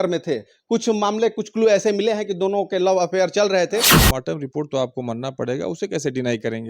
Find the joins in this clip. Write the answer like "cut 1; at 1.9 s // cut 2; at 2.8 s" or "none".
cut 1; at 3.9 s